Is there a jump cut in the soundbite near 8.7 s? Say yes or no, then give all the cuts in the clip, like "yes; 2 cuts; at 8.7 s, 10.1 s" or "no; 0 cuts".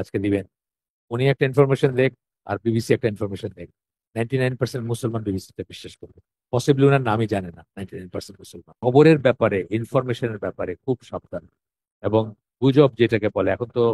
yes; 1 cut; at 8.7 s